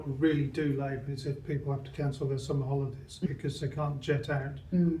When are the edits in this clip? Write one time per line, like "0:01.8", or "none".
0:01.0